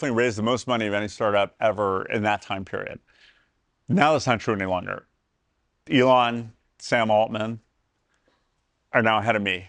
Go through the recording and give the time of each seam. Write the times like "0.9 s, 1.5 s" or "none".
none